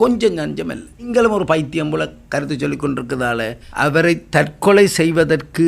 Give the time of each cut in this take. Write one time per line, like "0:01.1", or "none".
0:01.1
0:03.6